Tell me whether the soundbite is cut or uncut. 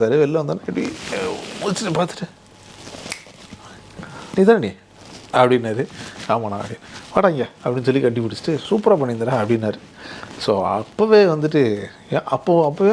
uncut